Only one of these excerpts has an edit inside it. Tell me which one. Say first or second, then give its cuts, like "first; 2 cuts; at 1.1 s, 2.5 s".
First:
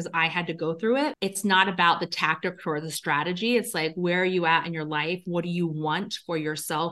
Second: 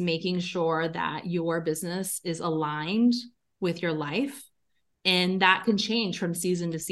first; 1 cut; at 1.2 s